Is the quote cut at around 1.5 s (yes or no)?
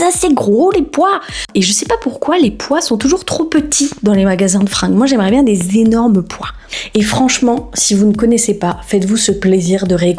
yes